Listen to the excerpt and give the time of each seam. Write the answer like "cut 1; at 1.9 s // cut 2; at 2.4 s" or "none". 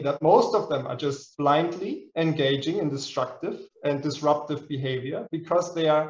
none

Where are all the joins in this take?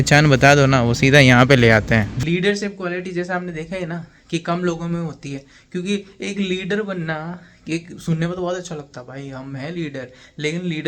cut 1; at 2.1 s

